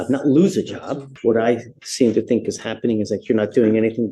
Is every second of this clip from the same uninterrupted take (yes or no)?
no